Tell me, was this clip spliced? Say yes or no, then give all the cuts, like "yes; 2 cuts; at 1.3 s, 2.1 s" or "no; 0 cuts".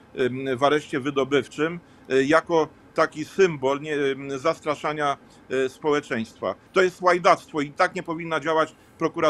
yes; 1 cut; at 6.6 s